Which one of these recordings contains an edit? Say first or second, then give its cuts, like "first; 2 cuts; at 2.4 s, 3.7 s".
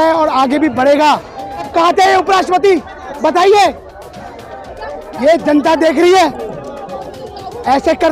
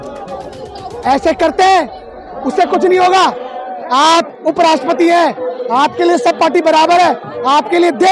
first; 1 cut; at 1.7 s